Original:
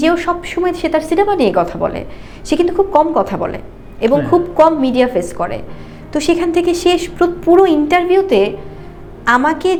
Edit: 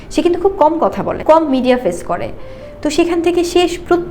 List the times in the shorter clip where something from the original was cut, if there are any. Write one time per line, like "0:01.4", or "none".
0:01.2